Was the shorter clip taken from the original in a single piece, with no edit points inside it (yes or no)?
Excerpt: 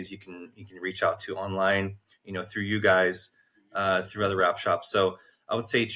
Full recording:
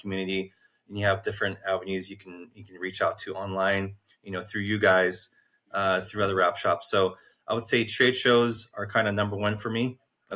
yes